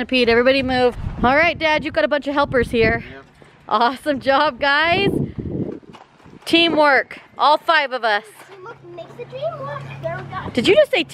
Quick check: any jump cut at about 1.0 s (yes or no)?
yes